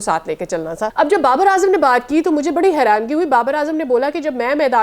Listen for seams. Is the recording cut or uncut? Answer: cut